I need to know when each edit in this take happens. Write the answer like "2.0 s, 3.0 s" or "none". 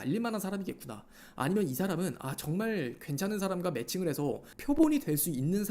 4.5 s